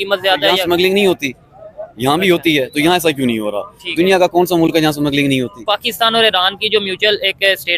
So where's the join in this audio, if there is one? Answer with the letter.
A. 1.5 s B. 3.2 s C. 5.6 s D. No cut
C